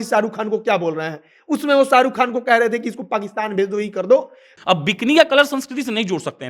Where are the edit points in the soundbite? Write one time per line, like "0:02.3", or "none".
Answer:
0:04.4